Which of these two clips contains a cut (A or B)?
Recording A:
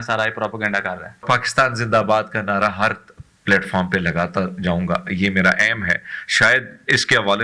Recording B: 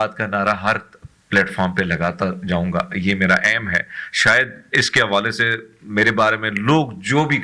A